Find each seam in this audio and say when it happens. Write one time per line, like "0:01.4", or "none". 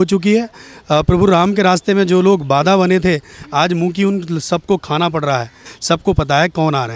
0:05.7

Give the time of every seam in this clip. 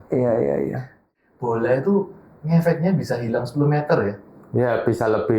0:01.1

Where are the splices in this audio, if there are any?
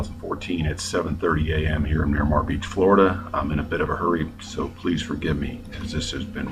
0:01.5

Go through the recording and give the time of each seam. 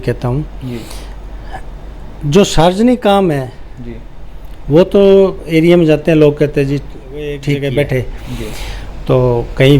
0:07.5

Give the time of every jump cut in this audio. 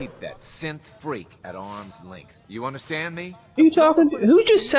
0:03.4

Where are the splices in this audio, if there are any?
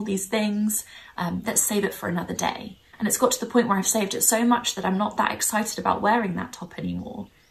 none

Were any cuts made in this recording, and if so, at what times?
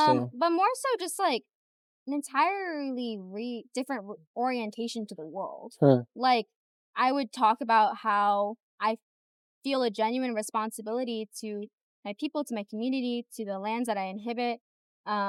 none

